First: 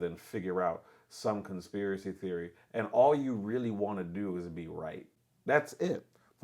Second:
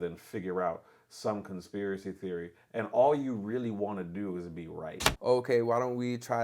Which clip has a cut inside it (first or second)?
second